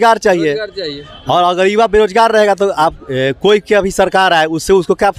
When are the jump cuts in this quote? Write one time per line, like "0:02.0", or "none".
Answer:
none